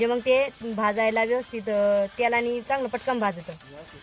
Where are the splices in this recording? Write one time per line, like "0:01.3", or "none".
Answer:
none